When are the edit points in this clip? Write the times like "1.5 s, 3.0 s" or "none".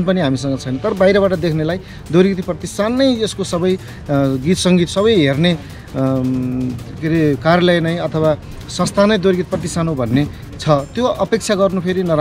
none